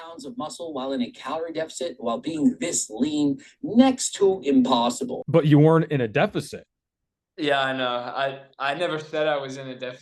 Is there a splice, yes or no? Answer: yes